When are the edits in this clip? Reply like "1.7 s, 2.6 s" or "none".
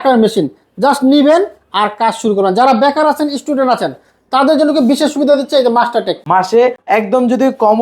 6.5 s